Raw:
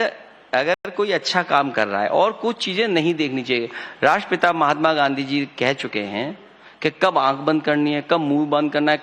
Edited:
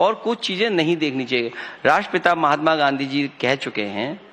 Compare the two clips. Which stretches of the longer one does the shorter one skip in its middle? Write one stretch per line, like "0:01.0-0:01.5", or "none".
none

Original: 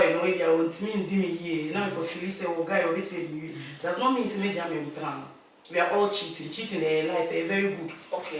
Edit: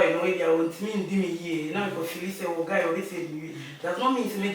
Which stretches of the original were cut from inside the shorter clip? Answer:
none

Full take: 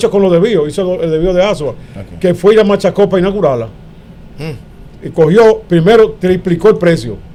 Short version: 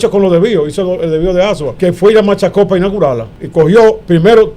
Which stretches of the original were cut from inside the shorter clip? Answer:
0:01.7-0:02.1
0:03.8-0:05.0

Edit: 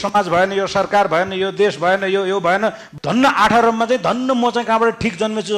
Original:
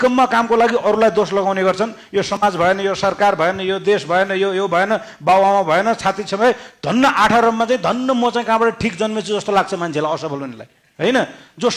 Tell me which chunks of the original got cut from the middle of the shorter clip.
0:05.1-0:06.7

